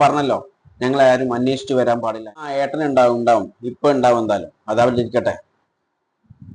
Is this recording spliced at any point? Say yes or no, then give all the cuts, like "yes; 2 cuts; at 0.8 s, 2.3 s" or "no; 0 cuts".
yes; 1 cut; at 2.5 s